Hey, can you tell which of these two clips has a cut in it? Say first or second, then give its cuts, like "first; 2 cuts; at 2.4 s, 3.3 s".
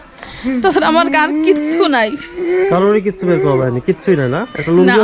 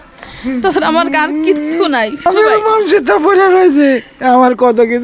second; 1 cut; at 2.3 s